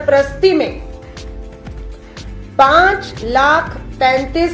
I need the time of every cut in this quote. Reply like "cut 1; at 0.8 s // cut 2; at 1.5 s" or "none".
cut 1; at 0.8 s // cut 2; at 2.6 s